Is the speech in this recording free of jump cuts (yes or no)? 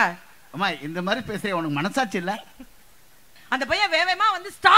no